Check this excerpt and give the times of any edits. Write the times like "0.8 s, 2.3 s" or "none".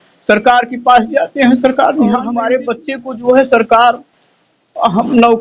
2.4 s